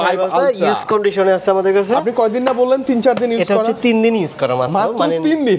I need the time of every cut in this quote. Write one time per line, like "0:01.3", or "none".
none